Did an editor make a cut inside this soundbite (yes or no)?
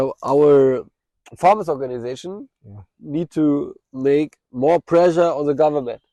no